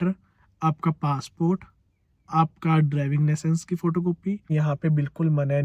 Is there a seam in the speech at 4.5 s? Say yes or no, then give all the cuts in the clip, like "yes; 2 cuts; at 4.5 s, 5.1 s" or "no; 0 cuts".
yes; 1 cut; at 4.5 s